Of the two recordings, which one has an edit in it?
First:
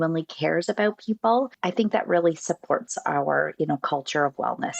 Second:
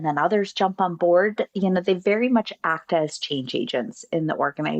first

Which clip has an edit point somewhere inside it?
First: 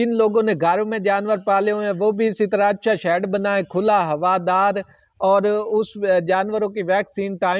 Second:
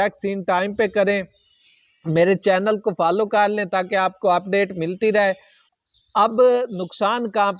second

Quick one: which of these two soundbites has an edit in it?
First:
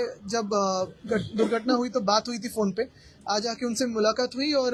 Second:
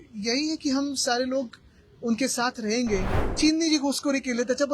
second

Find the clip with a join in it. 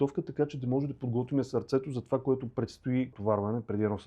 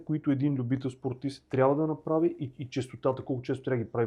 first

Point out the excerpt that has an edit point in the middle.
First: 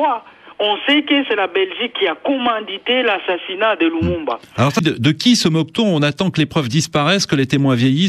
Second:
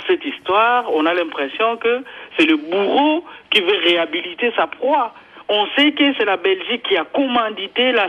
first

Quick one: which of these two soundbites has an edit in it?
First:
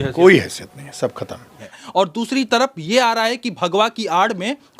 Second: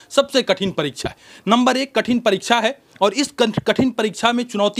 first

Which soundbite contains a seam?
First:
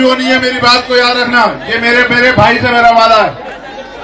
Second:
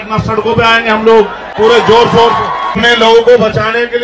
second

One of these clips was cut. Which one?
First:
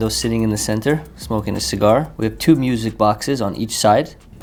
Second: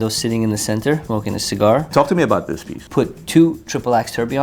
second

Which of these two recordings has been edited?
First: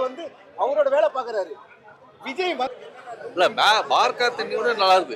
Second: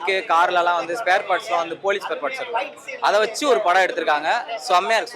first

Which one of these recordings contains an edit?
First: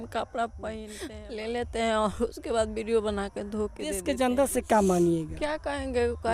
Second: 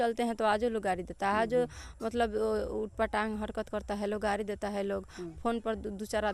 first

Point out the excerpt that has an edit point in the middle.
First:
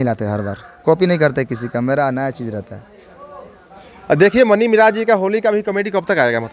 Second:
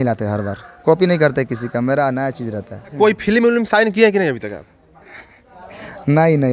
second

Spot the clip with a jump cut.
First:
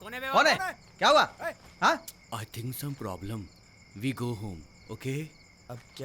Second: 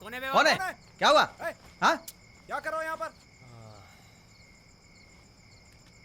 first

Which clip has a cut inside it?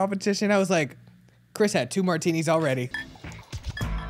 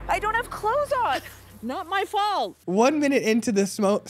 second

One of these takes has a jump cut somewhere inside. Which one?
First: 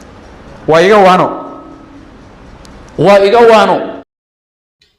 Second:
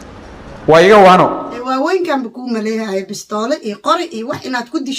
second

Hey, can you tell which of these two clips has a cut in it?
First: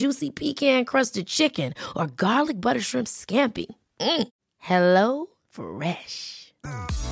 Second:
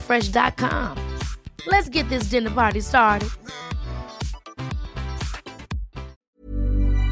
second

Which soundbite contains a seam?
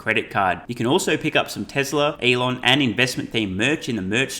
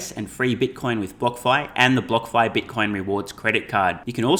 first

